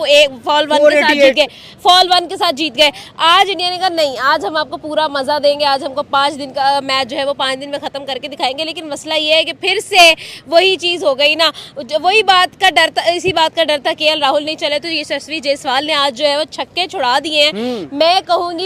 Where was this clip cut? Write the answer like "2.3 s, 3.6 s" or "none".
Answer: none